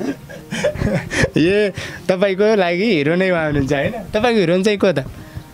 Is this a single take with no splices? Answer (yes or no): yes